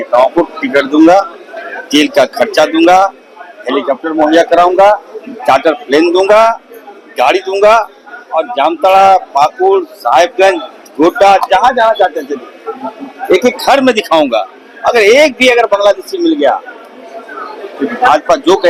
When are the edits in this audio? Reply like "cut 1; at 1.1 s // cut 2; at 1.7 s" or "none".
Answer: none